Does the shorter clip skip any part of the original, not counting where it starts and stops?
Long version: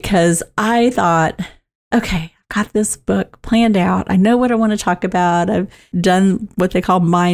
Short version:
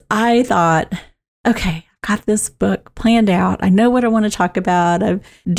no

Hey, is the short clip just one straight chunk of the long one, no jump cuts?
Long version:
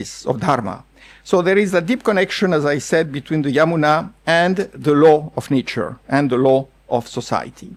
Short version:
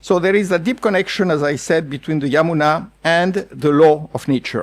yes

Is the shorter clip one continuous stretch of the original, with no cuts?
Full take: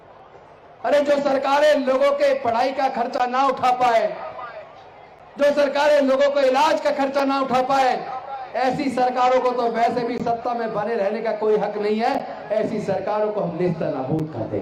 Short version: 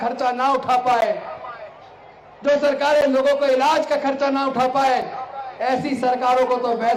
yes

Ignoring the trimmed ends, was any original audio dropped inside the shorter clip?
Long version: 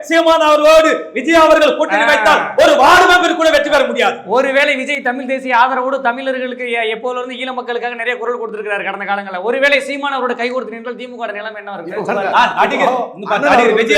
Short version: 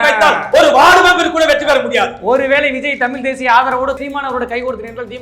yes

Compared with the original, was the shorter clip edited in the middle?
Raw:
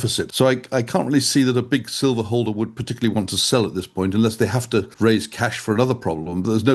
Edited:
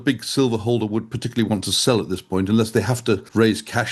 no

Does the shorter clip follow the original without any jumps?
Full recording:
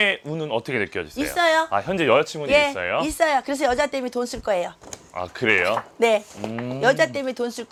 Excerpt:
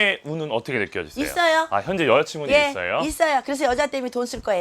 yes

